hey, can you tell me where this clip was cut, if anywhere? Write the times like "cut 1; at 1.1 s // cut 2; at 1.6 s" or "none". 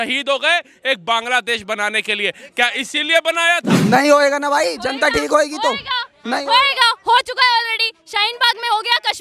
cut 1; at 3.8 s